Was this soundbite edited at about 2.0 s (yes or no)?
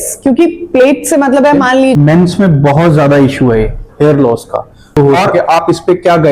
yes